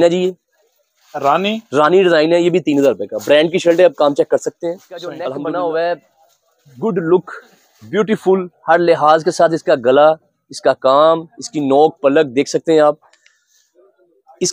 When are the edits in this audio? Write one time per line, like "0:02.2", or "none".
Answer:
0:05.1